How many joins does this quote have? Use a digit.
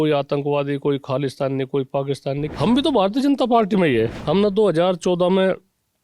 2